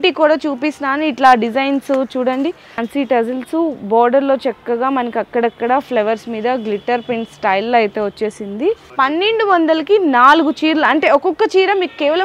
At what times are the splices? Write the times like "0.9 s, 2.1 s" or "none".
2.8 s, 8.9 s